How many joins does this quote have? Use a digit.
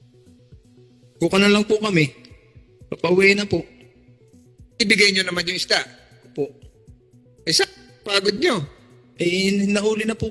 1